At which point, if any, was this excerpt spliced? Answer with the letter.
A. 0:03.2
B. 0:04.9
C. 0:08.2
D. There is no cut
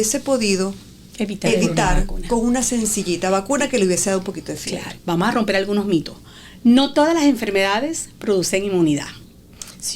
B